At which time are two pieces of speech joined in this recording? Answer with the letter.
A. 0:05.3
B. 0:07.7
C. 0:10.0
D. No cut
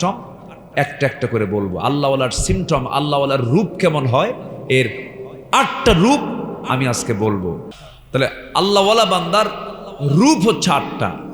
B